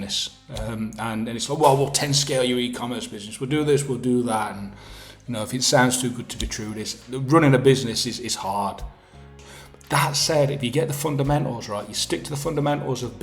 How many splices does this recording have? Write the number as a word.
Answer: one